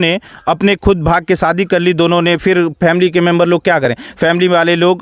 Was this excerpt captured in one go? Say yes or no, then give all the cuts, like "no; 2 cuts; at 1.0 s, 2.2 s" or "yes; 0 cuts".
yes; 0 cuts